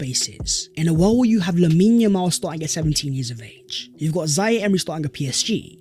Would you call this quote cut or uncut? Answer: uncut